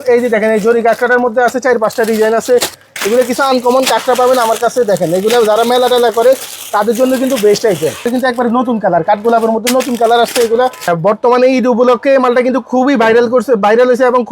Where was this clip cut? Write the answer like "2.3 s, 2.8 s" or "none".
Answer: 2.8 s, 8.1 s, 10.9 s